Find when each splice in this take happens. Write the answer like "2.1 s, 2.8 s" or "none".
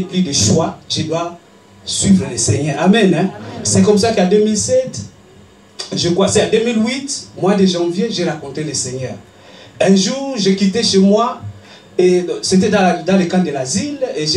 none